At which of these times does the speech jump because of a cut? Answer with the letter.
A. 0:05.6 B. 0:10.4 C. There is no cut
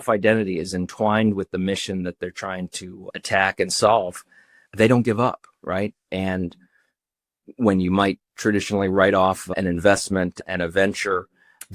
B